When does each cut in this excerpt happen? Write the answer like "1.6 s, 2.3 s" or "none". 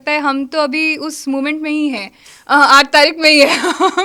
none